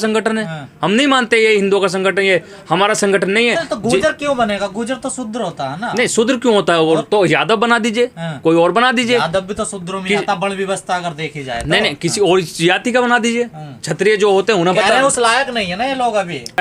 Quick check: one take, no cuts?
yes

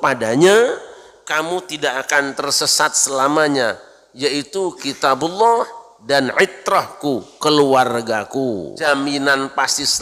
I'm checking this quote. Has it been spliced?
yes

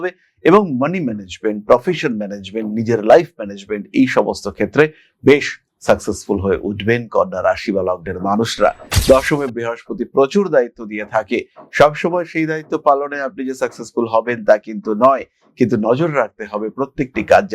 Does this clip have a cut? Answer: yes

